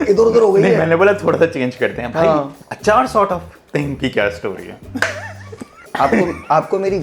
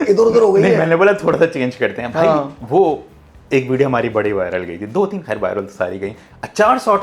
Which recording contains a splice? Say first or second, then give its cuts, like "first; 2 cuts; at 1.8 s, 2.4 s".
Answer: first; 2 cuts; at 2.6 s, 5.8 s